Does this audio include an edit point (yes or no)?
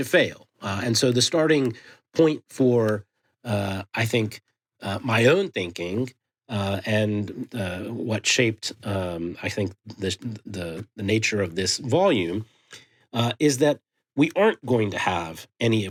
no